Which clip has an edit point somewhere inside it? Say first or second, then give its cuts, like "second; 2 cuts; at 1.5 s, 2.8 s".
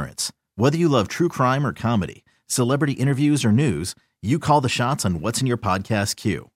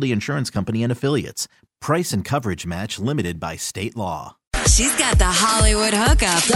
second; 1 cut; at 4.5 s